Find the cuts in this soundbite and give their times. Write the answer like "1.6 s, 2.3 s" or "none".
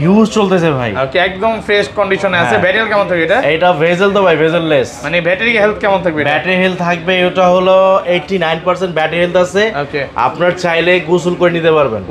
none

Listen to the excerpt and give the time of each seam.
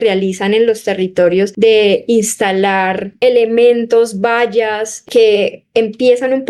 1.5 s, 3.1 s, 5.0 s

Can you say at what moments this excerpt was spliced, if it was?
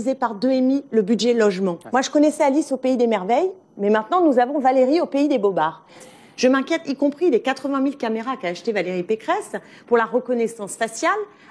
1.8 s, 6.0 s

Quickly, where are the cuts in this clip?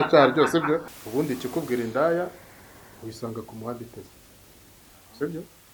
0.9 s

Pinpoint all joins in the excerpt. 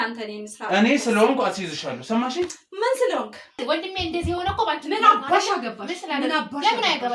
3.6 s

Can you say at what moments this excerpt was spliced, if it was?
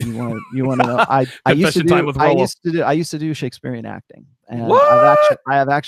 none

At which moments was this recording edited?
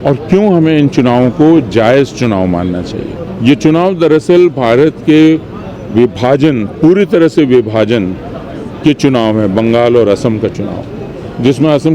3.2 s

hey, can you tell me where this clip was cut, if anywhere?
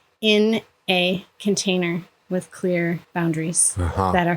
3.1 s

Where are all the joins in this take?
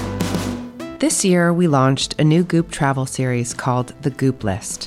0.9 s

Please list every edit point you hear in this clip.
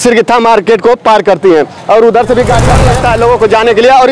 2.7 s

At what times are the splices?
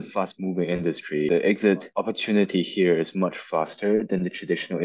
1.3 s, 1.9 s

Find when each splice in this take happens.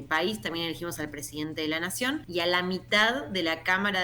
2.3 s

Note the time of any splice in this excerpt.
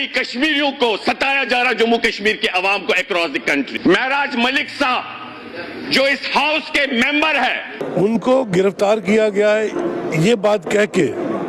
3.7 s, 7.8 s

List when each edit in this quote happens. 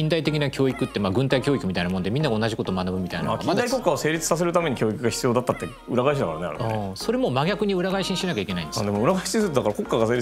none

